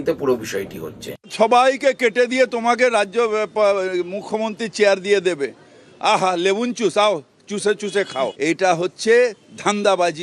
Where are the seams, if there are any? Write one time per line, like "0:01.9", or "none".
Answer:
0:01.3
0:08.3